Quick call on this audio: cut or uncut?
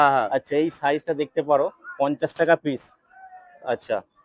uncut